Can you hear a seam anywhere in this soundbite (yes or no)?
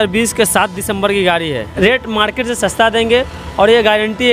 yes